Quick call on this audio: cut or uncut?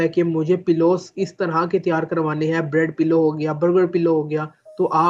uncut